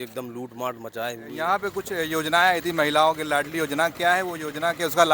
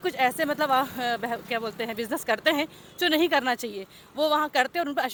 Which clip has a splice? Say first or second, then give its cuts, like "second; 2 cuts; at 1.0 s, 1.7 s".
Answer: first; 1 cut; at 1.3 s